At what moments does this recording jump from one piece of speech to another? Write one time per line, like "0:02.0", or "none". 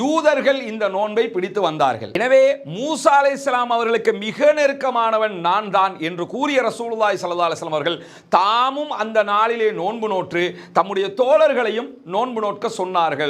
none